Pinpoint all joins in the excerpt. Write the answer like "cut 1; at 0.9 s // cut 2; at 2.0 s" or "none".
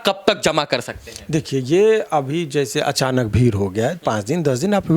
none